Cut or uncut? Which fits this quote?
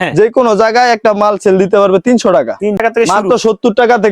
cut